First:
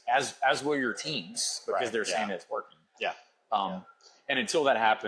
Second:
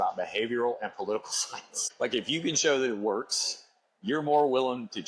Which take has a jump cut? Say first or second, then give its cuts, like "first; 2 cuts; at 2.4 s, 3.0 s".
second; 1 cut; at 1.9 s